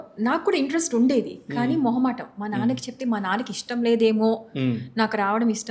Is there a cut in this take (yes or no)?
no